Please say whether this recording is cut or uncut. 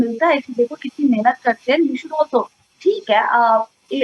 uncut